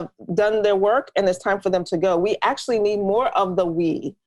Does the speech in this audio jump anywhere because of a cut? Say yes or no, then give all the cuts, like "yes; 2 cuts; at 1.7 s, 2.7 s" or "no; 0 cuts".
no; 0 cuts